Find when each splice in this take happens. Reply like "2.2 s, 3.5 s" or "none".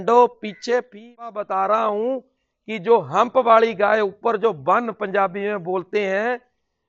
1.3 s